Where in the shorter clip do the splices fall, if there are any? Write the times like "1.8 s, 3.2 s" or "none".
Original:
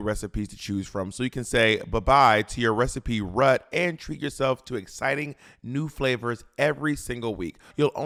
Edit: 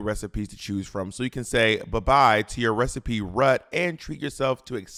none